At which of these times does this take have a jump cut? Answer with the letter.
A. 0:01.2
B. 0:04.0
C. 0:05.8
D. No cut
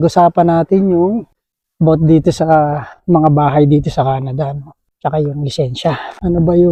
D